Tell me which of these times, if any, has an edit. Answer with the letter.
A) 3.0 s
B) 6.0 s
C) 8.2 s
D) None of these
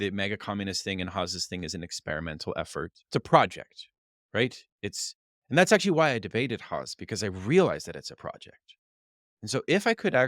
A